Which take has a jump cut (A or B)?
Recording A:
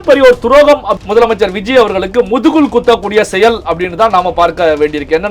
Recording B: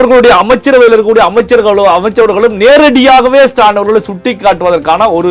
A